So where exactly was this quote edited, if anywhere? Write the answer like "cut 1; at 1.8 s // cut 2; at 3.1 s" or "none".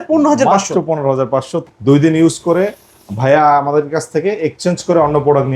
cut 1; at 1.6 s

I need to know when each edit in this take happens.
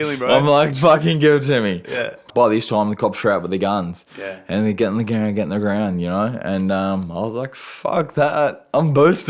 cut 1; at 2.3 s

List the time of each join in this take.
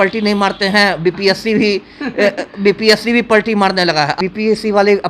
cut 1; at 4.2 s

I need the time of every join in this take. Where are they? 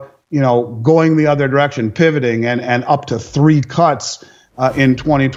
none

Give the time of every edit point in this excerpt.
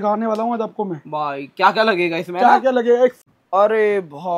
cut 1; at 3.2 s

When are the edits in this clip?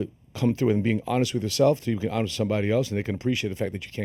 none

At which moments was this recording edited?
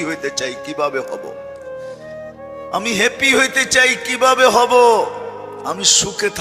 none

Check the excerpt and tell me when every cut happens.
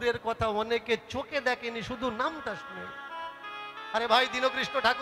none

